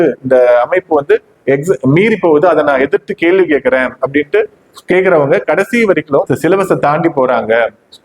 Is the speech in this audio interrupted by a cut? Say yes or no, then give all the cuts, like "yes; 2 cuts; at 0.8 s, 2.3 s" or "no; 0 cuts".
yes; 1 cut; at 6.3 s